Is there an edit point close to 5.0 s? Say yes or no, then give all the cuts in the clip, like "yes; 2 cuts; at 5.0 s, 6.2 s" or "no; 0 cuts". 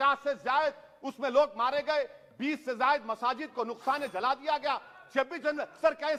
no; 0 cuts